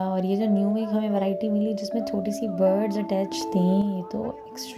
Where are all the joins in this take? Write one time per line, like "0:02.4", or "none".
none